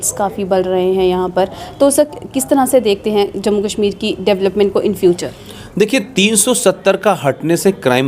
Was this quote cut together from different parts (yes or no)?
no